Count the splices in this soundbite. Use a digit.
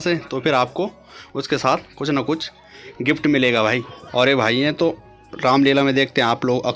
1